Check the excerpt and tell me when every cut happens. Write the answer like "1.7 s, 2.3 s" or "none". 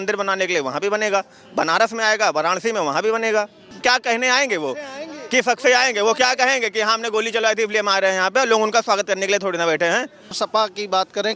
3.7 s, 10.4 s